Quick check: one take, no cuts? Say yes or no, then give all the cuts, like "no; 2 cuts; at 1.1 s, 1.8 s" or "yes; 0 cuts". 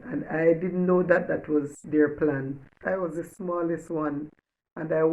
no; 1 cut; at 2.8 s